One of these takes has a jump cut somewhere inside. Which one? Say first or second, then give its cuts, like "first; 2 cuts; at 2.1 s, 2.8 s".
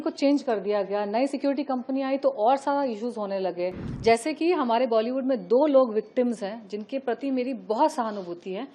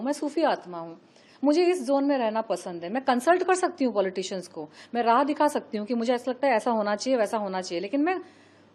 first; 1 cut; at 3.8 s